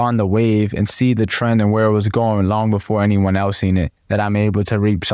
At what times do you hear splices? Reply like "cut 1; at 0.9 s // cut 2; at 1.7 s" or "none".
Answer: none